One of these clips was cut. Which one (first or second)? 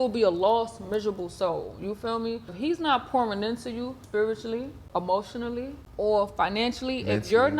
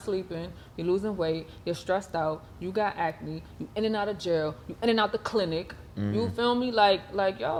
first